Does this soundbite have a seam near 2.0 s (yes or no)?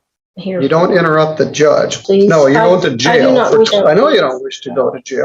yes